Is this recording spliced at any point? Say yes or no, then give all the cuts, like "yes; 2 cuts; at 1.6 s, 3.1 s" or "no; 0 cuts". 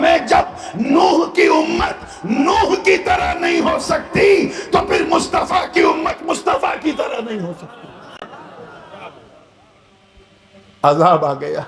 no; 0 cuts